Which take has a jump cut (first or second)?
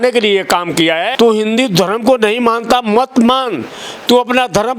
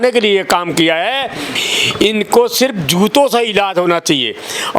first